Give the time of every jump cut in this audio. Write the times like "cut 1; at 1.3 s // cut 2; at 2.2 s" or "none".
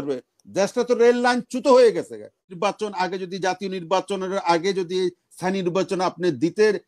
cut 1; at 2.5 s

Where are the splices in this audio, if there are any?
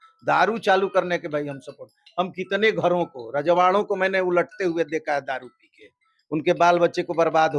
none

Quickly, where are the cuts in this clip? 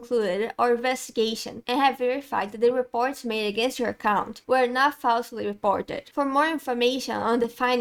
none

